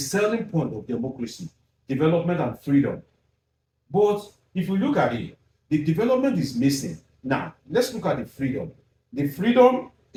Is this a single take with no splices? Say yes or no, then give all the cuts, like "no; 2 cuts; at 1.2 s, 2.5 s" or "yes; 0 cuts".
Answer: yes; 0 cuts